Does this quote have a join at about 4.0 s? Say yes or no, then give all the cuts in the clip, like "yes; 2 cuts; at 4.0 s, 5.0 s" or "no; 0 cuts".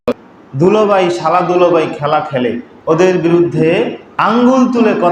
yes; 2 cuts; at 2.7 s, 4.0 s